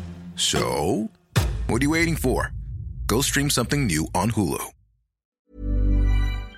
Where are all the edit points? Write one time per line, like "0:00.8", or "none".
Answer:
0:05.2